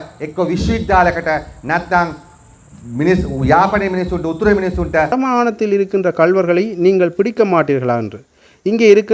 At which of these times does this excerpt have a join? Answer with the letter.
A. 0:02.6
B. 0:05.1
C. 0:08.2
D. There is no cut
B